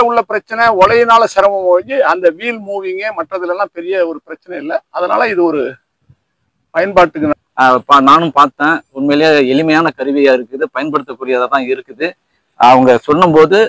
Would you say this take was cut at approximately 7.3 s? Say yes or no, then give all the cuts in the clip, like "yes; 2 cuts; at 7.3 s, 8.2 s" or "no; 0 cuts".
yes; 1 cut; at 7.3 s